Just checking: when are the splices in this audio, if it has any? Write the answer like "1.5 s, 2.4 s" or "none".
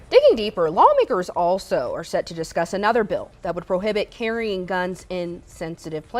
none